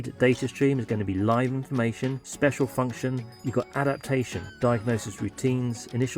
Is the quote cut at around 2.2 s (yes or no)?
yes